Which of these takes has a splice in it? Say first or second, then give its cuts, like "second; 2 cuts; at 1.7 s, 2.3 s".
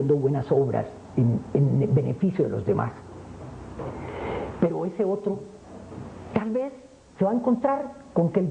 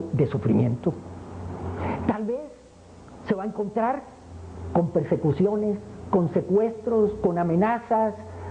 first; 1 cut; at 2.3 s